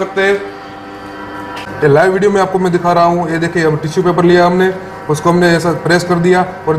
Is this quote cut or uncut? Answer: cut